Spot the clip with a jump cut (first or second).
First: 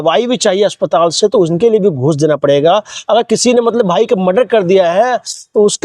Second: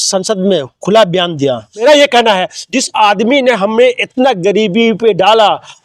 second